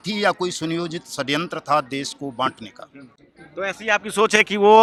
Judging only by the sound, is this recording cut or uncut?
uncut